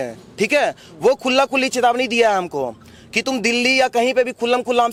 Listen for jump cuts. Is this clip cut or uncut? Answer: uncut